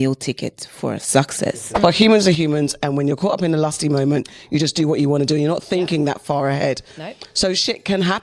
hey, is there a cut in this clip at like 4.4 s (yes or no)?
no